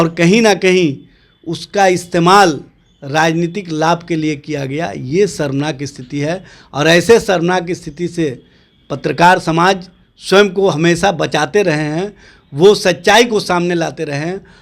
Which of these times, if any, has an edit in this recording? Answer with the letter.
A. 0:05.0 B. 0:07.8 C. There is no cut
C